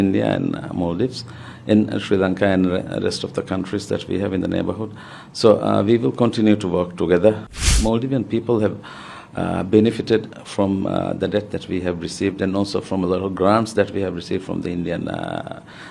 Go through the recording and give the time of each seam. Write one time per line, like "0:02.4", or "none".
0:07.7